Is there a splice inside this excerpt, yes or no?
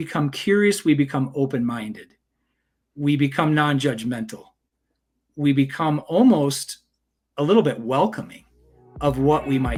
no